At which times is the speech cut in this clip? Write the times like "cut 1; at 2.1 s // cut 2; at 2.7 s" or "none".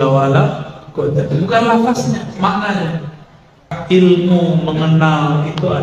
cut 1; at 3.8 s